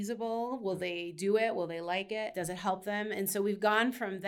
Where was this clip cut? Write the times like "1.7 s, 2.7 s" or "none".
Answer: 2.3 s